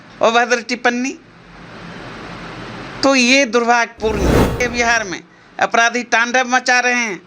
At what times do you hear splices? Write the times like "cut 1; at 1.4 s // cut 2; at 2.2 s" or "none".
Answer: cut 1; at 4.6 s